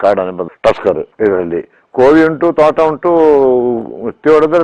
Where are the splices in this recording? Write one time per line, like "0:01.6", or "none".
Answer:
0:01.1

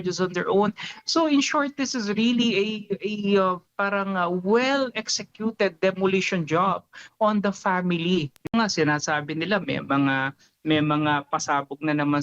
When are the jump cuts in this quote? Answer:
0:08.5

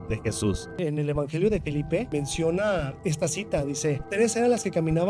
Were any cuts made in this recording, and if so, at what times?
0:00.8
0:02.1
0:02.9
0:04.0

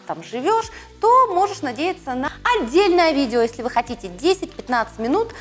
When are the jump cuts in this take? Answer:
0:02.2

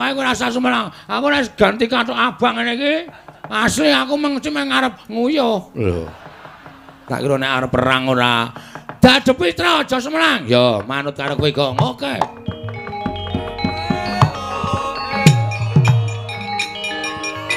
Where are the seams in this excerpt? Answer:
none

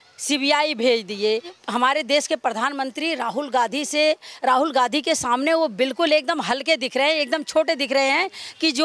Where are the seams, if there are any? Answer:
0:01.5

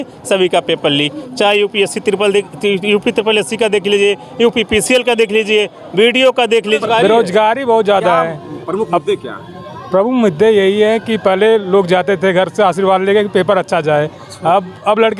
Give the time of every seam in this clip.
0:06.8

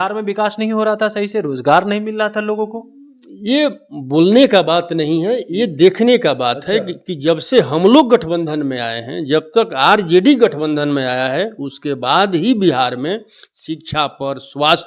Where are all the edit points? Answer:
none

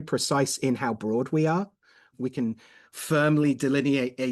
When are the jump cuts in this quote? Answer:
0:02.1

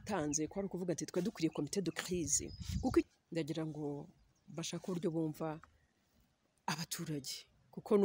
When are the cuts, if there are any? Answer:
0:03.0

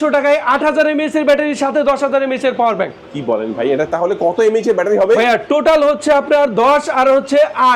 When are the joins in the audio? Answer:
none

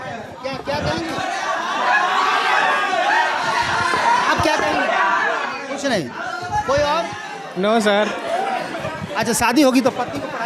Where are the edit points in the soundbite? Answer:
0:07.2

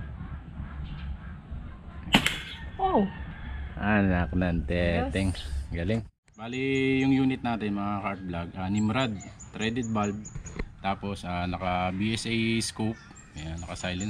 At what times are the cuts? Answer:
0:06.5

